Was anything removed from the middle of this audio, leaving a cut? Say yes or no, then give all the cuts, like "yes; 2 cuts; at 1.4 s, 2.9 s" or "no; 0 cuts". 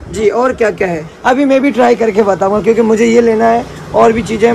yes; 1 cut; at 1.1 s